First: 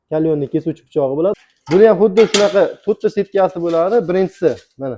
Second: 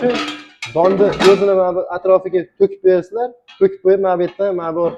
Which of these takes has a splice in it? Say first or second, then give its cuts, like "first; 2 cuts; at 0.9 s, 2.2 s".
first; 1 cut; at 1.3 s